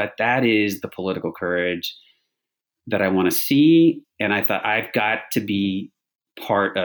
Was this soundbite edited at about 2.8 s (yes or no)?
no